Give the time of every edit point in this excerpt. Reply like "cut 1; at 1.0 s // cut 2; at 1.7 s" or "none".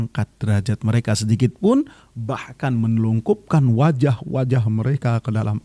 none